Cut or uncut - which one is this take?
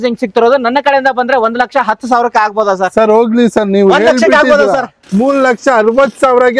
cut